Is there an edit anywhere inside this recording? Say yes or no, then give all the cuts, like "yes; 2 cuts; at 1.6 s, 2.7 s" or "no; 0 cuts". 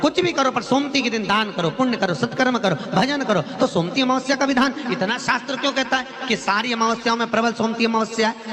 yes; 1 cut; at 5.7 s